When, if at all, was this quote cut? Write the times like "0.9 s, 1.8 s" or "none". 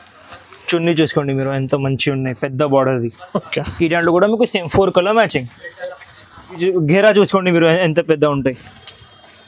6.6 s